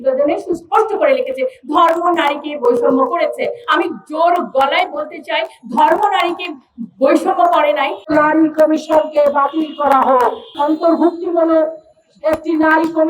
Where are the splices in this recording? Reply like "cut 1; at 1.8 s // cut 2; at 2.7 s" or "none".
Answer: cut 1; at 8.0 s // cut 2; at 10.5 s